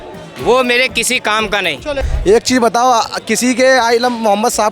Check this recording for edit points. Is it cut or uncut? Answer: cut